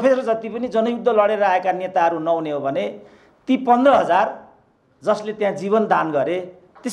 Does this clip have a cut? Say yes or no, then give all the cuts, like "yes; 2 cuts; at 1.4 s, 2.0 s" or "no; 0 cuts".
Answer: no; 0 cuts